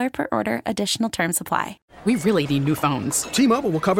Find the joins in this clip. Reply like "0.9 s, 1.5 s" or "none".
1.8 s